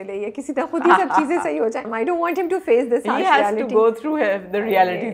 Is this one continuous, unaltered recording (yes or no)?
no